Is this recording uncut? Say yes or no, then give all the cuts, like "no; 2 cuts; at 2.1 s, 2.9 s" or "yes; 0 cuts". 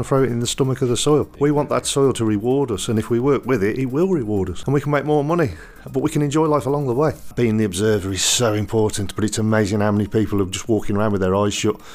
no; 3 cuts; at 1.3 s, 4.6 s, 7.3 s